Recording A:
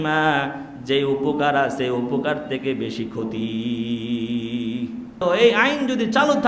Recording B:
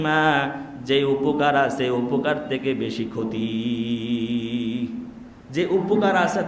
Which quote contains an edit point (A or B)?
A